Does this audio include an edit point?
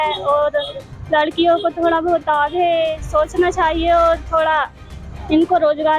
no; 0 cuts

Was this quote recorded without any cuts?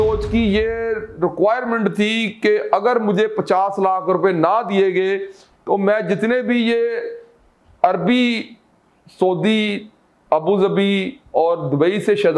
yes; 0 cuts

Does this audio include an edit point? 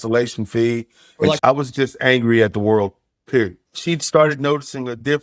yes; 2 cuts; at 1.4 s, 3.6 s

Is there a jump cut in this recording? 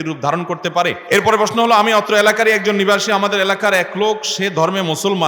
yes; 1 cut; at 1.0 s

